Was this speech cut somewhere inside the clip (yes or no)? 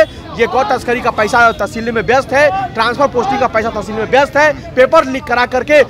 no